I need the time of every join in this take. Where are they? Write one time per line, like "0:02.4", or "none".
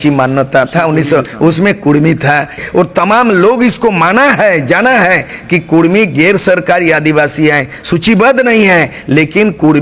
0:02.6